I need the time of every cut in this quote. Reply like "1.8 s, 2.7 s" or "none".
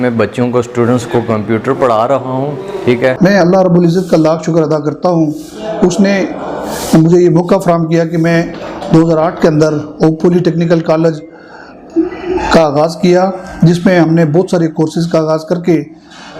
3.2 s